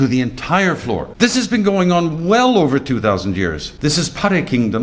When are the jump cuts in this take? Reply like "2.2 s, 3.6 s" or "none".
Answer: 1.1 s, 3.7 s